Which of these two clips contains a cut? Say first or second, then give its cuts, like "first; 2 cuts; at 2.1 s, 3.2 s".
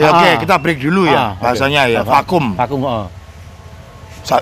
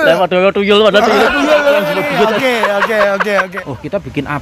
second; 1 cut; at 3.5 s